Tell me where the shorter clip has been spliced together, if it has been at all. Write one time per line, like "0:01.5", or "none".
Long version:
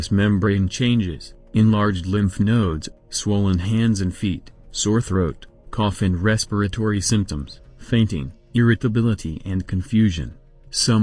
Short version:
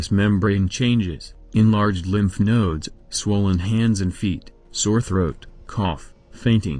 0:05.8